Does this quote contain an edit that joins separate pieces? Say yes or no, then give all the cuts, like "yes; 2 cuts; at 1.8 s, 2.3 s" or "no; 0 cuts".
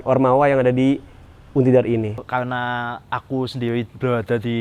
no; 0 cuts